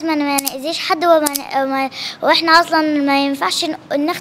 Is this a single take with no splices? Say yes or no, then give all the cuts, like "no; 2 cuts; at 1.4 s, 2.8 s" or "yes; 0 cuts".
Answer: yes; 0 cuts